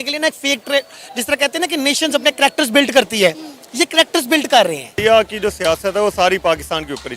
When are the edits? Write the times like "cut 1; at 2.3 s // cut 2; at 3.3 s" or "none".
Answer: cut 1; at 4.9 s